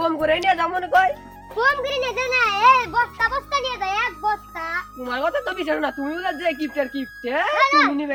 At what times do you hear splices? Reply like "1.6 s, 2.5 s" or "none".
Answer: none